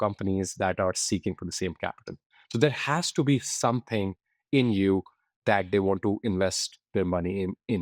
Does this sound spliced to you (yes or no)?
no